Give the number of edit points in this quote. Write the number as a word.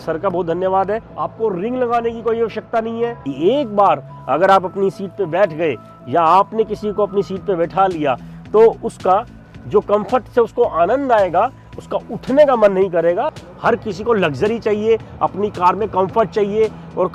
three